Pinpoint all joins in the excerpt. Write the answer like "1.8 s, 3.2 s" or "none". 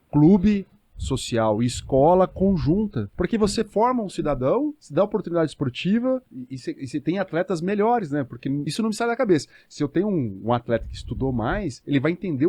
3.0 s, 4.8 s, 6.4 s, 8.7 s